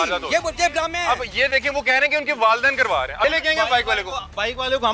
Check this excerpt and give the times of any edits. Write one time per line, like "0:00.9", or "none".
0:03.2

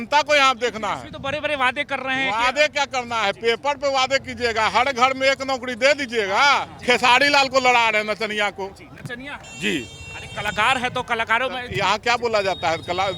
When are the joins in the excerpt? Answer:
0:06.7

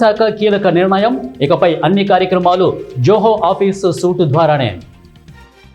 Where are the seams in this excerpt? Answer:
0:04.8

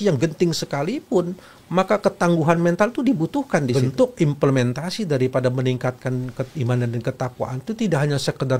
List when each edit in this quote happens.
0:03.8

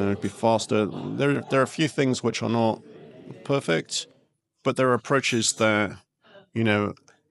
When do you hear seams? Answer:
none

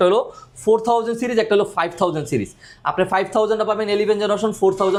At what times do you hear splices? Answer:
none

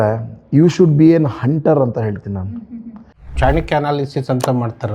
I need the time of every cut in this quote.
0:03.3

